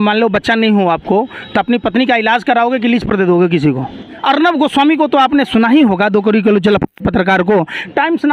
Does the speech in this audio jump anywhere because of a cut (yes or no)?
yes